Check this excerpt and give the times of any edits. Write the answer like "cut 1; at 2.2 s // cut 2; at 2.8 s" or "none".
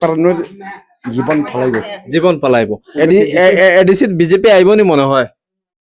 cut 1; at 2.8 s

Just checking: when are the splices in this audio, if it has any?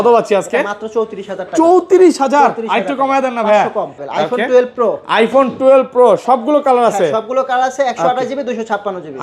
cut 1; at 4.0 s

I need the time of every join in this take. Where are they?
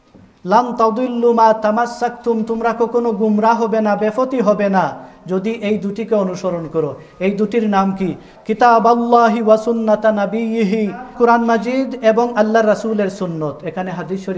cut 1; at 8.3 s // cut 2; at 11.1 s

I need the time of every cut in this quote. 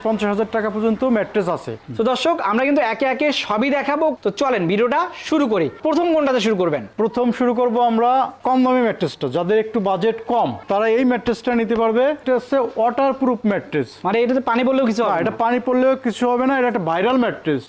none

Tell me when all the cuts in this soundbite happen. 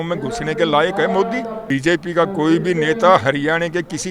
cut 1; at 1.6 s

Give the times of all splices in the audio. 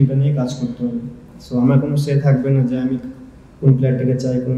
none

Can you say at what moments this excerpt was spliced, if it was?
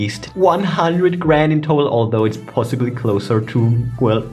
none

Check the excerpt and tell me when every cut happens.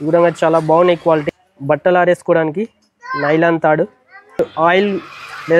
cut 1; at 1.2 s

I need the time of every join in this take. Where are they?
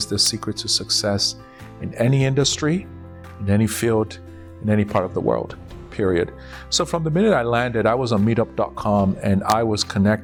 none

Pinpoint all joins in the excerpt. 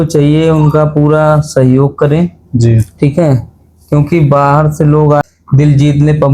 cut 1; at 5.2 s

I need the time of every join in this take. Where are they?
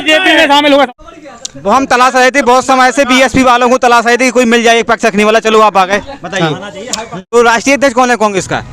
cut 1; at 0.9 s // cut 2; at 7.3 s

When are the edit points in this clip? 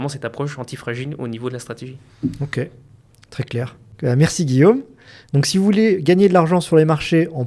none

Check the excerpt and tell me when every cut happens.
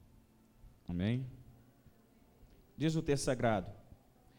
none

